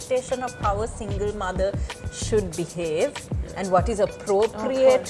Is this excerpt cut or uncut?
uncut